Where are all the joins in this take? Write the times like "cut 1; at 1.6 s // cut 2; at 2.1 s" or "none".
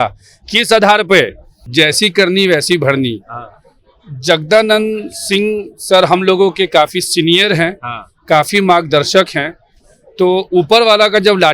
cut 1; at 1.6 s